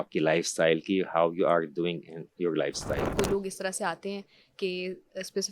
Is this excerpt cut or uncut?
cut